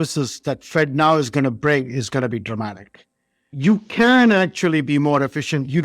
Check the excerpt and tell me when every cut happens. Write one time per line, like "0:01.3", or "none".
0:03.5